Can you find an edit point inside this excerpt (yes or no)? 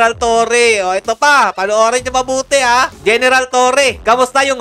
yes